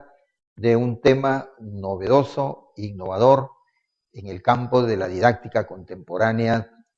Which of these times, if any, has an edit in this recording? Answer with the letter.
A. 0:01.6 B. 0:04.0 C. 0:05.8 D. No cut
D